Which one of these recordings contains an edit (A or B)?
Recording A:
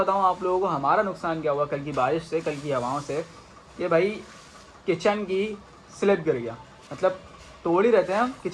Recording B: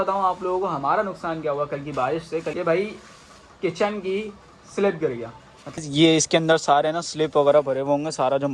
B